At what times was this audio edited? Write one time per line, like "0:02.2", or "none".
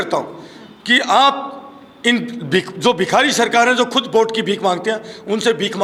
none